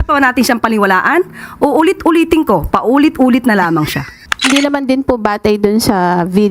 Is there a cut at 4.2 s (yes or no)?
no